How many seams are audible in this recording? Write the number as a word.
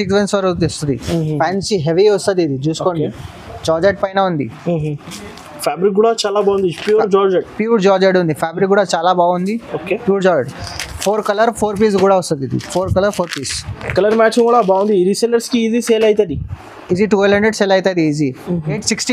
zero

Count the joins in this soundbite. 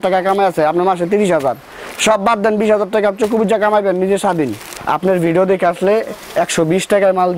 one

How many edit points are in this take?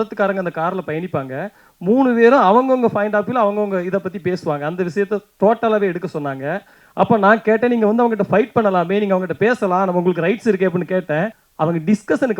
two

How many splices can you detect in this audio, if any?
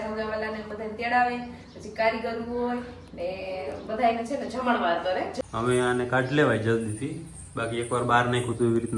one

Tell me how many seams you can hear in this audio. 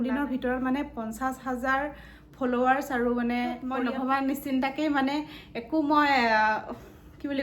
one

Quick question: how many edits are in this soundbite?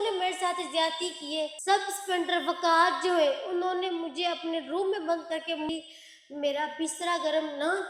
two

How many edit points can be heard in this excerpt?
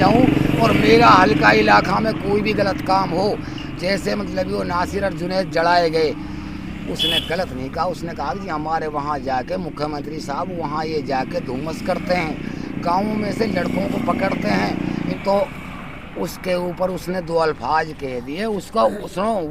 one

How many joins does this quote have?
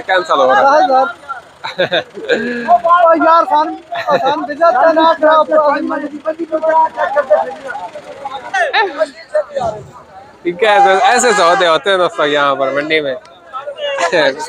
one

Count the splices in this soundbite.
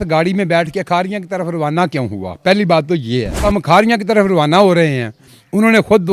one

